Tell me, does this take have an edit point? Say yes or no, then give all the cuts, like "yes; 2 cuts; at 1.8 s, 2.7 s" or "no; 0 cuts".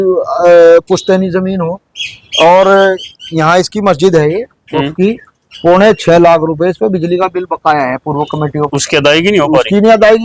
no; 0 cuts